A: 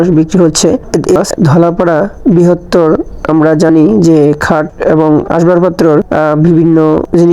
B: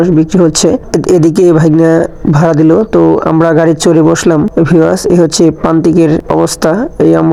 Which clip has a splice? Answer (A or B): A